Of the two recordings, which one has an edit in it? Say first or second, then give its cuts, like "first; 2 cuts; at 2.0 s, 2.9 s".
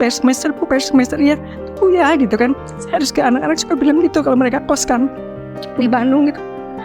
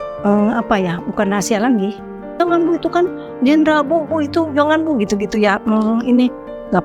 second; 1 cut; at 2.4 s